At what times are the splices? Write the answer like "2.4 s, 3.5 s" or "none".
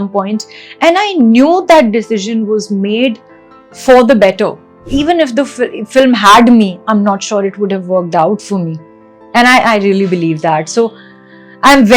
4.8 s